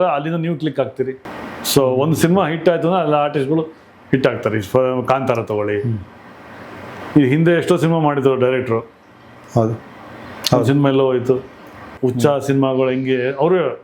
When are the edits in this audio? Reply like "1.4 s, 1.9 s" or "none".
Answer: 1.3 s, 11.9 s